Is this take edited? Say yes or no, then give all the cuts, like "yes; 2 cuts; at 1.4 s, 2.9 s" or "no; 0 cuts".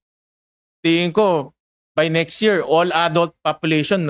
no; 0 cuts